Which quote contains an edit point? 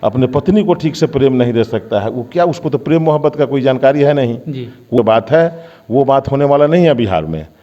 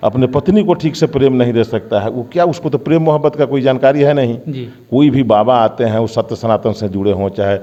first; 1 cut; at 5.0 s

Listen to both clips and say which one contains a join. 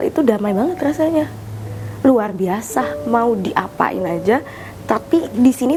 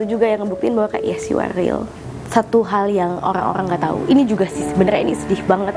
second; 1 cut; at 2.0 s

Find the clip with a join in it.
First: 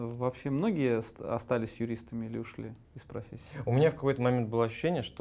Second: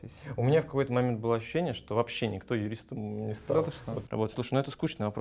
second; 1 cut; at 4.0 s

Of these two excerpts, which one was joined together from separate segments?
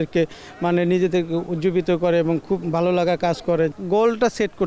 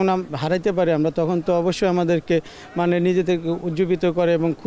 first; 1 cut; at 3.7 s

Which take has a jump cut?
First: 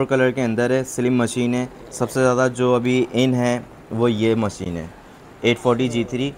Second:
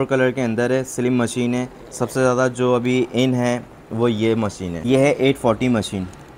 second; 1 cut; at 4.7 s

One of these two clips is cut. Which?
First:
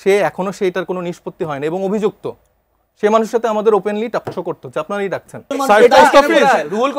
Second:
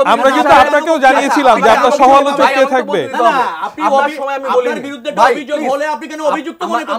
first; 1 cut; at 5.5 s

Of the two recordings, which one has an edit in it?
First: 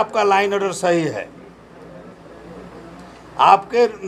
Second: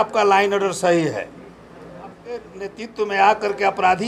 second; 1 cut; at 2.6 s

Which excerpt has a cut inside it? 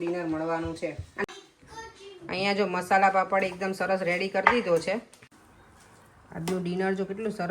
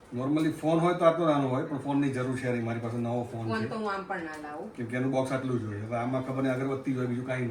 first; 2 cuts; at 1.2 s, 5.1 s

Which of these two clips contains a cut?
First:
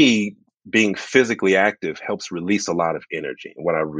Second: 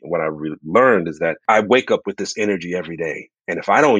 second; 1 cut; at 1.4 s

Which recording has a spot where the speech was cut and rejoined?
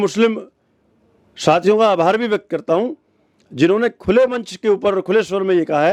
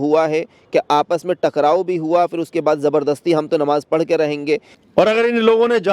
second; 1 cut; at 4.8 s

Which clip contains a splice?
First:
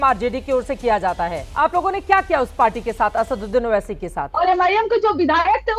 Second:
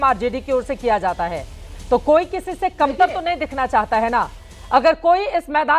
first; 2 cuts; at 1.4 s, 4.2 s

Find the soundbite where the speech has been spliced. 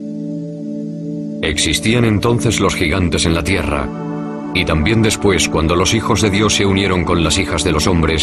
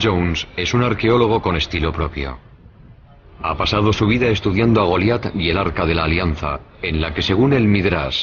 second; 1 cut; at 2.8 s

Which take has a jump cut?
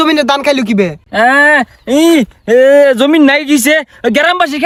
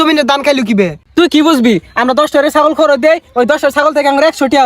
second; 1 cut; at 1.0 s

